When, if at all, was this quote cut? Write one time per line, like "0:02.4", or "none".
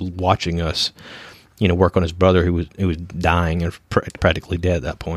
none